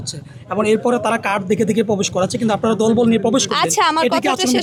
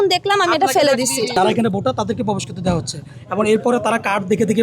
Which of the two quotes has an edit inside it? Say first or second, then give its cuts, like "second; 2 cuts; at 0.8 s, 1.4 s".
second; 1 cut; at 1.4 s